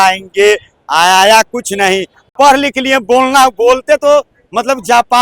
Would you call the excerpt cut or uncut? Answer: cut